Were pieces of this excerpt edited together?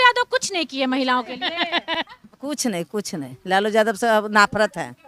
yes; 1 cut; at 2.0 s

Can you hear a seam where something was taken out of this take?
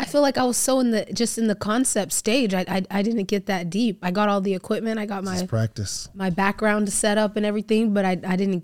no; 0 cuts

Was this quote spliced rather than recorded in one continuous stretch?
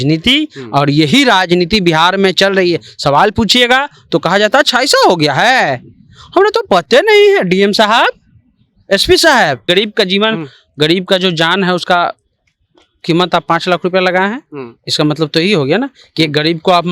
yes; 1 cut; at 9.6 s

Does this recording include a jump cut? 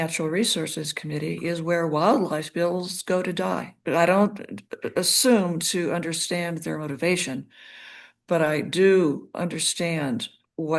yes; 1 cut; at 3.7 s

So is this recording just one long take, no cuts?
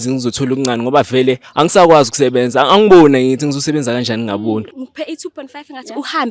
no; 1 cut; at 4.8 s

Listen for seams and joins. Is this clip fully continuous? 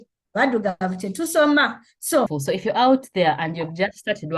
no; 1 cut; at 2.4 s

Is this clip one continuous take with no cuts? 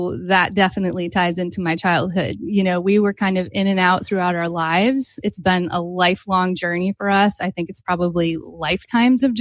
yes; 0 cuts

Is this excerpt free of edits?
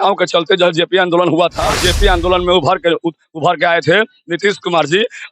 no; 1 cut; at 1.6 s

